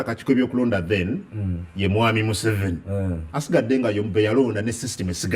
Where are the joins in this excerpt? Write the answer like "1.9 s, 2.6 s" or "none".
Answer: none